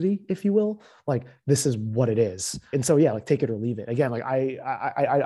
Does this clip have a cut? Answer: no; 0 cuts

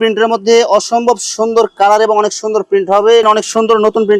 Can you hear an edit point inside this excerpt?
yes; 1 cut; at 3.2 s

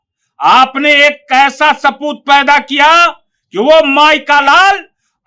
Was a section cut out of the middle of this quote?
no; 0 cuts

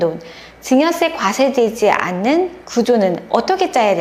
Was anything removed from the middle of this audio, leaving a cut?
yes; 1 cut; at 2.6 s

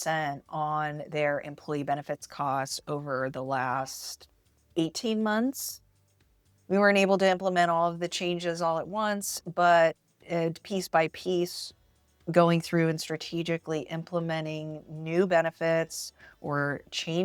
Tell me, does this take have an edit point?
no; 0 cuts

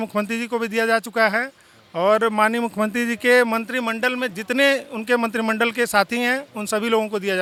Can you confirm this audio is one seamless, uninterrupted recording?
yes; 0 cuts

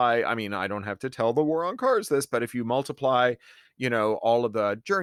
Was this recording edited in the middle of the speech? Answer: no; 0 cuts

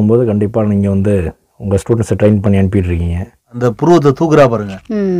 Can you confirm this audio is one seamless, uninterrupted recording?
no; 1 cut; at 3.5 s

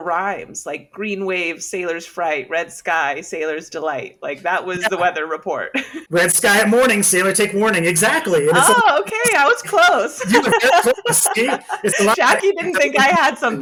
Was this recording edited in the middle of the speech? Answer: no; 0 cuts

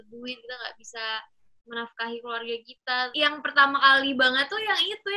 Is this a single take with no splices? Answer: no; 1 cut; at 3.1 s

